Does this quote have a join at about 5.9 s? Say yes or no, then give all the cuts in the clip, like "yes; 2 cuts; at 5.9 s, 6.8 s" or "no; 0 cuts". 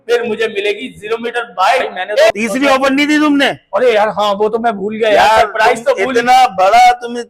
no; 1 cut; at 2.3 s